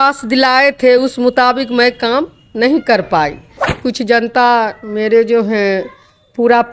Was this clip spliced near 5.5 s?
no; 1 cut; at 3.7 s

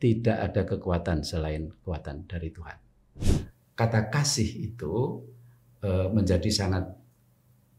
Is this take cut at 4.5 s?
no; 1 cut; at 3.2 s

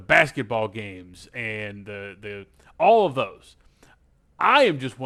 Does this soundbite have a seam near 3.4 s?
no; 0 cuts

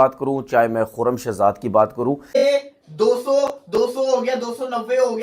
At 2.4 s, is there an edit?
yes; 1 cut; at 2.4 s

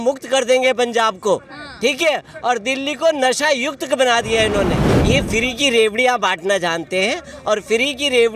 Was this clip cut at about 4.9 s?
yes; 1 cut; at 4.9 s

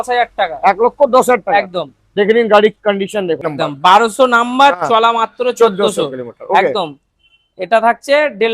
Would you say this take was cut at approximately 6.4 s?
no; 1 cut; at 3.5 s

